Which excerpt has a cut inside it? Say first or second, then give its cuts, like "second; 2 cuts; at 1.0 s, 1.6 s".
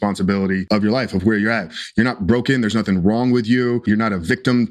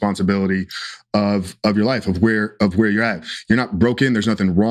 first; 2 cuts; at 1.2 s, 3.8 s